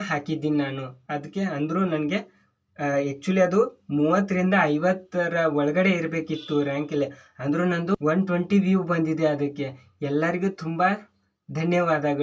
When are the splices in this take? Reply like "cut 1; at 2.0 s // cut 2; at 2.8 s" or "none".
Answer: none